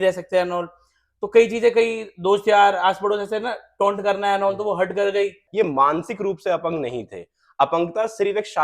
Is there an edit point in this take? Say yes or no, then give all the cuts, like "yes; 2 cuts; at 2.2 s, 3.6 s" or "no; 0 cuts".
yes; 1 cut; at 5.4 s